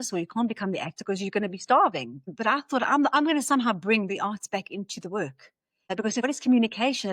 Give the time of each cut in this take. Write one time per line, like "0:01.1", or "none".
0:02.3
0:06.1

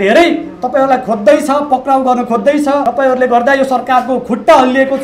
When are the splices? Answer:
0:02.9

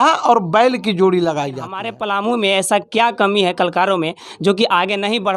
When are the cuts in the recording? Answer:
0:02.0

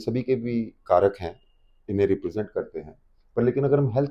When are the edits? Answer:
none

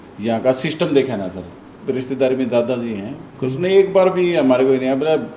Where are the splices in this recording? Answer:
0:03.3

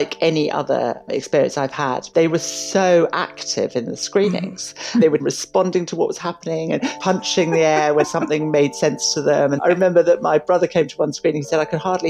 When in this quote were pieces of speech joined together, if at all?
0:02.0
0:05.1
0:07.0
0:08.1
0:09.6

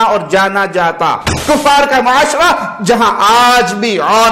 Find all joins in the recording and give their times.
0:01.4

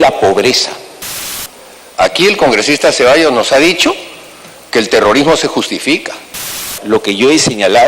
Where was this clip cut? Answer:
0:01.5
0:06.8

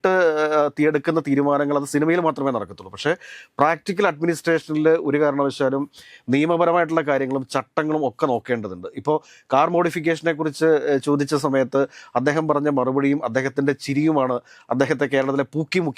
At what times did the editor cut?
none

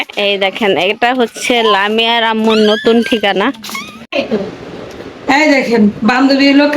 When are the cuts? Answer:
0:04.1

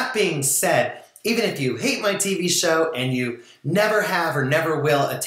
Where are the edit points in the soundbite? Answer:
none

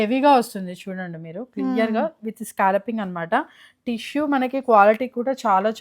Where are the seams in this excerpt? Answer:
none

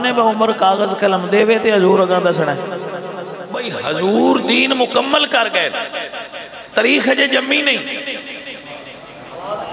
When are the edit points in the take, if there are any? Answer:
0:03.7

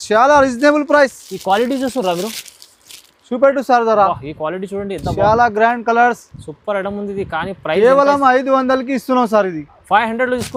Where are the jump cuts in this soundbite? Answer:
none

